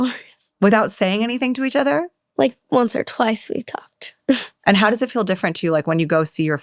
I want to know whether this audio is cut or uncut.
cut